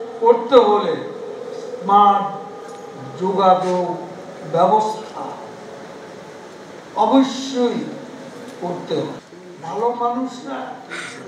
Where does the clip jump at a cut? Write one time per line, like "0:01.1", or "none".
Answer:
0:09.2